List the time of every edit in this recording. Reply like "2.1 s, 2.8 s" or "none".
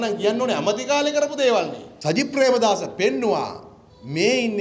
1.9 s